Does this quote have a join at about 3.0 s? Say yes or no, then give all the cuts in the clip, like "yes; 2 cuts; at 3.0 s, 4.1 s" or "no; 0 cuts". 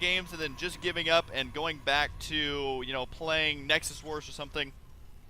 no; 1 cut; at 1.4 s